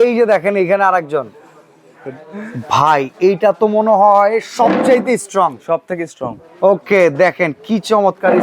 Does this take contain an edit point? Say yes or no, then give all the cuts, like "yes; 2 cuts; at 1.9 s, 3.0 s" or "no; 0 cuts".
no; 0 cuts